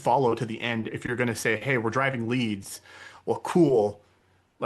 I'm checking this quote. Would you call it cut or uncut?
cut